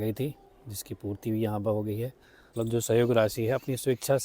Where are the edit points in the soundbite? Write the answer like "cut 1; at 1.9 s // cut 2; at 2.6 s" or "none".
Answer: cut 1; at 2.4 s